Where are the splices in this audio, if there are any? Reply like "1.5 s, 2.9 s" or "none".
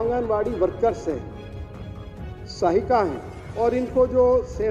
3.4 s